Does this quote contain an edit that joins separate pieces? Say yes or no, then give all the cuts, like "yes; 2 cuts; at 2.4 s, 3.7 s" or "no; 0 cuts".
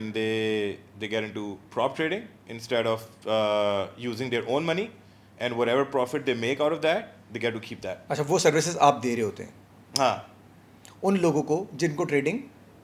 yes; 1 cut; at 8.0 s